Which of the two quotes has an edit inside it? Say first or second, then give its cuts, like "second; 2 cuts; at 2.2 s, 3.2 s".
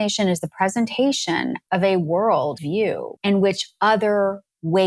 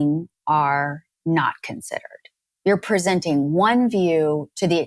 first; 2 cuts; at 1.6 s, 2.6 s